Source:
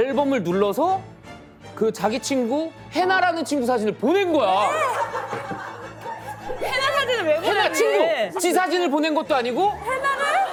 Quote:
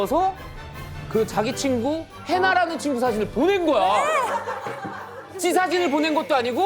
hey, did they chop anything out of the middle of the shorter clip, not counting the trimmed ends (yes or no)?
yes